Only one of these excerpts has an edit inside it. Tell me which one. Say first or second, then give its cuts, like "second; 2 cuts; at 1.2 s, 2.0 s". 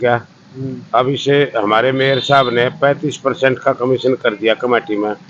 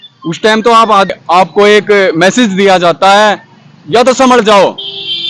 second; 1 cut; at 1.1 s